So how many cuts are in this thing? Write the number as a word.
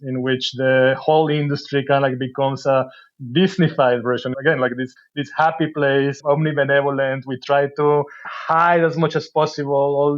four